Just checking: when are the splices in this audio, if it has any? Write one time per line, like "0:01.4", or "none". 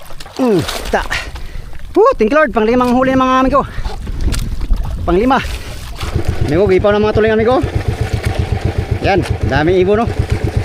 0:06.2